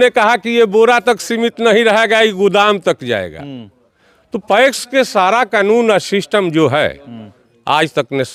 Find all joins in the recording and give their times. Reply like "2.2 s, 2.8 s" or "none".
none